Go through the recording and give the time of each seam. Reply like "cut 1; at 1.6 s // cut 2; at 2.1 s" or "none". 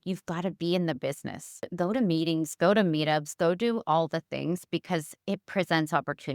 cut 1; at 1.7 s